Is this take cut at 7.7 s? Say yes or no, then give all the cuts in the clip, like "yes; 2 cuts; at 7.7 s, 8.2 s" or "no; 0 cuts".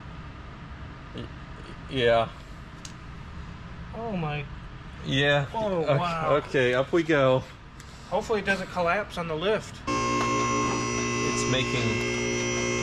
no; 1 cut; at 9.9 s